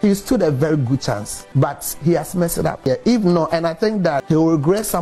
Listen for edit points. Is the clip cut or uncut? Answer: cut